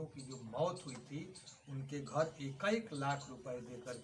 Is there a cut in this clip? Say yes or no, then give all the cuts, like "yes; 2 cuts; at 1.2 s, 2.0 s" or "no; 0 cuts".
no; 0 cuts